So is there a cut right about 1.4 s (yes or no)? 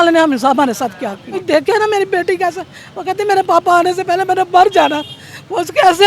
yes